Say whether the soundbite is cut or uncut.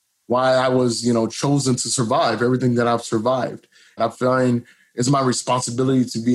cut